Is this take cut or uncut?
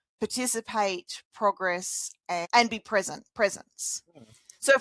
cut